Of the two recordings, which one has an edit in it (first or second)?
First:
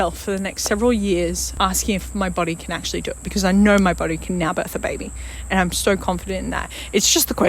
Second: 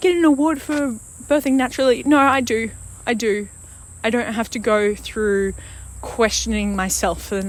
first